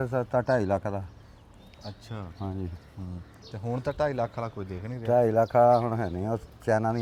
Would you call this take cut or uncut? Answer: uncut